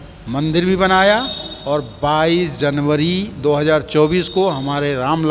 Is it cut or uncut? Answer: uncut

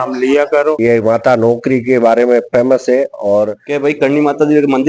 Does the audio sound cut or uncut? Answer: cut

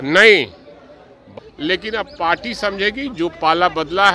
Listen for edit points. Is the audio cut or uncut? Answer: cut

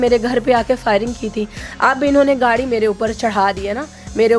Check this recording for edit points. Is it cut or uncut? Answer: uncut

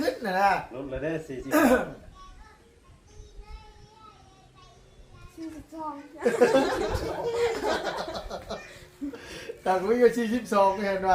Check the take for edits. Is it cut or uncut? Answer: uncut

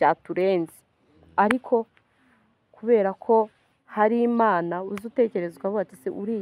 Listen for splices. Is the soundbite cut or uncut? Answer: uncut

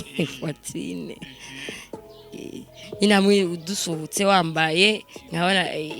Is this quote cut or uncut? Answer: cut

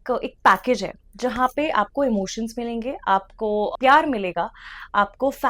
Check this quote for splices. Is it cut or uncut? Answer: cut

